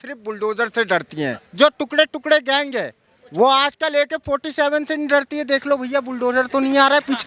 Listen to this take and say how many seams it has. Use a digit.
1